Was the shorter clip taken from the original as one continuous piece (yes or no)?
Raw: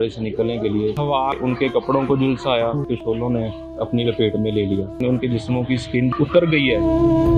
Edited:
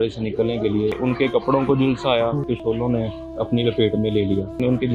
no